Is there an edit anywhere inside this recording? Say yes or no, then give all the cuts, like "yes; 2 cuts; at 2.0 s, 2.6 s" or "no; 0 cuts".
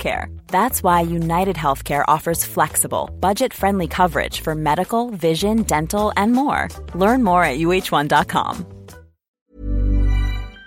yes; 1 cut; at 9.3 s